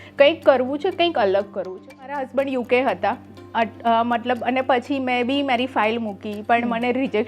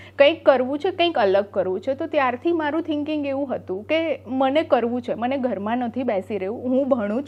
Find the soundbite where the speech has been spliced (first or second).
first